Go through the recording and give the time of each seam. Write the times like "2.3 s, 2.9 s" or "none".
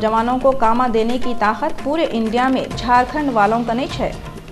none